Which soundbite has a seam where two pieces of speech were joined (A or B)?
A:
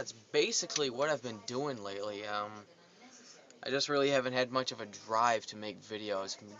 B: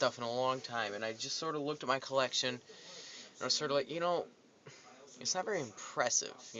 A